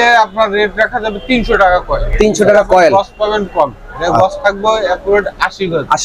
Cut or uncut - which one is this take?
uncut